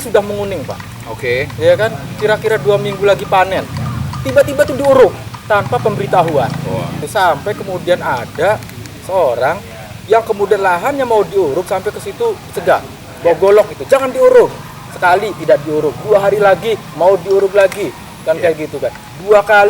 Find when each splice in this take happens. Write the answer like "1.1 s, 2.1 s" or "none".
7.0 s

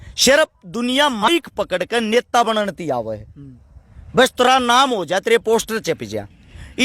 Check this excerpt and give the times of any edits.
1.3 s

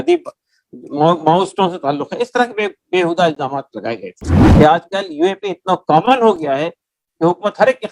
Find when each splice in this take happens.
4.4 s

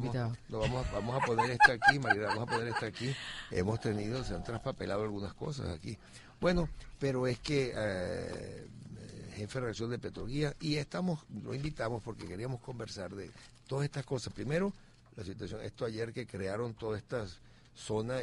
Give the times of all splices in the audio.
11.2 s

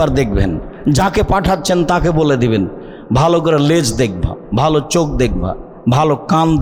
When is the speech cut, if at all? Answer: none

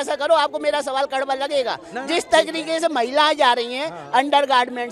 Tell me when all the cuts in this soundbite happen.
none

